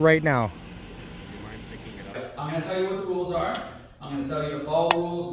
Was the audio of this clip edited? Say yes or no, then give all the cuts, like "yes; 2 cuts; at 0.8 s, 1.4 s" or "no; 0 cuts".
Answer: yes; 1 cut; at 2.1 s